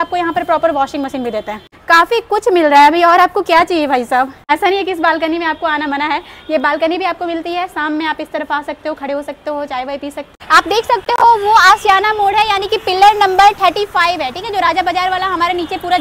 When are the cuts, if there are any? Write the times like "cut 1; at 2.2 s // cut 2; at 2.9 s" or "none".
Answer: none